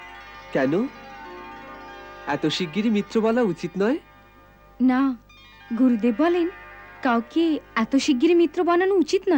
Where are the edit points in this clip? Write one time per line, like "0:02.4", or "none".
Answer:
none